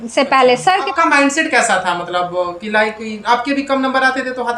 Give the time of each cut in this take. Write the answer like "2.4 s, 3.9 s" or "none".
0.9 s

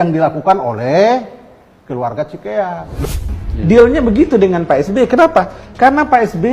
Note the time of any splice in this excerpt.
3.3 s

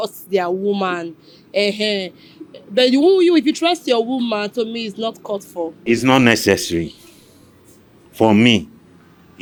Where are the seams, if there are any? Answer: none

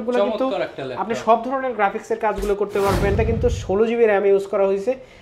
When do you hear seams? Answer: 3.2 s

